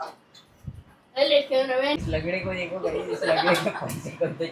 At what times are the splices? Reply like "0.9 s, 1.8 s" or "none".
2.0 s